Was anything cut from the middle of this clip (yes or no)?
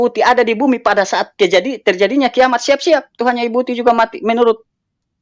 no